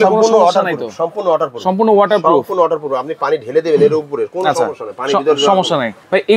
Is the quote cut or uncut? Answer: uncut